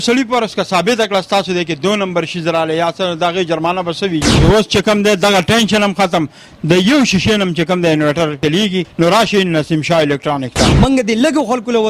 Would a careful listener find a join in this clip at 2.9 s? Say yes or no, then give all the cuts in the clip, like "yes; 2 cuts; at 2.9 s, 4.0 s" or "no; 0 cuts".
no; 3 cuts; at 4.3 s, 8.6 s, 10.7 s